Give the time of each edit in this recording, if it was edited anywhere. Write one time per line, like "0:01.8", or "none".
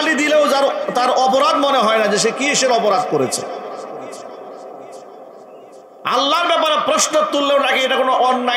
none

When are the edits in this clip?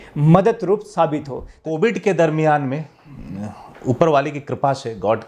0:01.6

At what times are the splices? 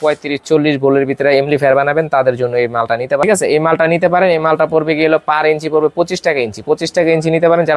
0:03.2

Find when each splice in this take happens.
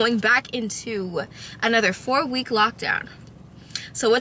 none

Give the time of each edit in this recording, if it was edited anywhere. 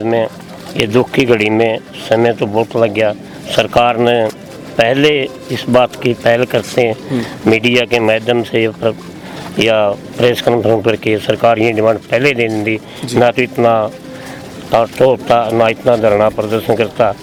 none

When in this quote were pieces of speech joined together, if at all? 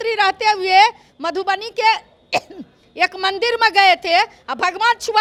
none

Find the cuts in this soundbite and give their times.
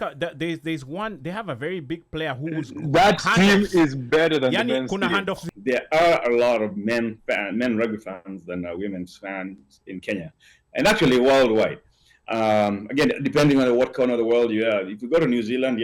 0:05.5

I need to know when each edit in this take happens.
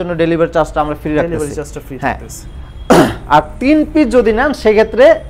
none

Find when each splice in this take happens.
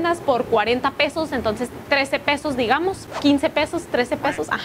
none

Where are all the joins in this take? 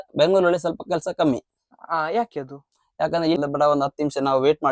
0:03.4

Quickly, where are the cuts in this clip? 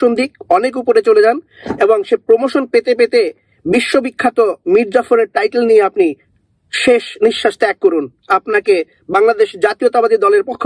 none

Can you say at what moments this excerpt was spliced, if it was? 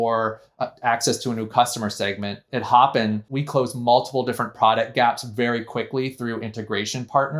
0:02.5
0:03.3

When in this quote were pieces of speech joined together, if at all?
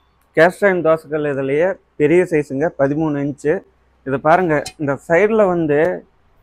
none

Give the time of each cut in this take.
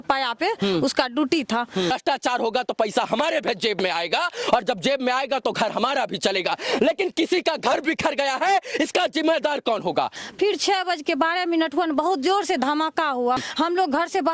0:01.9
0:10.2
0:13.4

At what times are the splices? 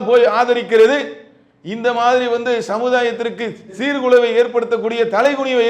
none

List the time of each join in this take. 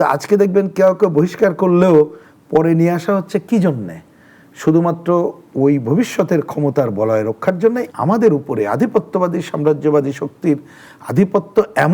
0:07.9

